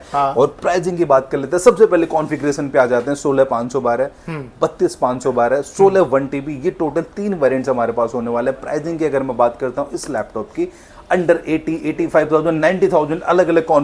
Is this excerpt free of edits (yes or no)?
yes